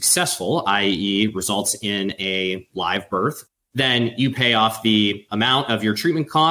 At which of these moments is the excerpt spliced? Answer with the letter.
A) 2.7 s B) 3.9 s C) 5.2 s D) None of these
D